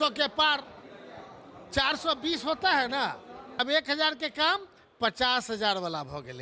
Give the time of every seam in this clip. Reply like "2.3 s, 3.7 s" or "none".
3.6 s